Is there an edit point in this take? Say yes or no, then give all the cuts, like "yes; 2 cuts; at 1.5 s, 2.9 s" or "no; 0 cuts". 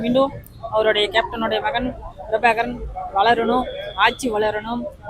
no; 0 cuts